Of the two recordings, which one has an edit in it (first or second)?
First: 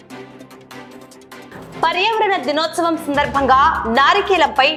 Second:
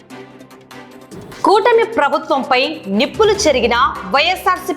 second